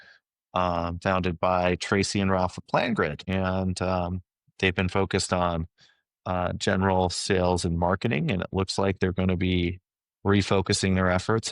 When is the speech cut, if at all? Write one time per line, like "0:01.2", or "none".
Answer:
0:03.2